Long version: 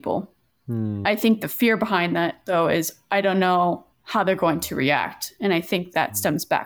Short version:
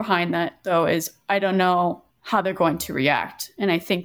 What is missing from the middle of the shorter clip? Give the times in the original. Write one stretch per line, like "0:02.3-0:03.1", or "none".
none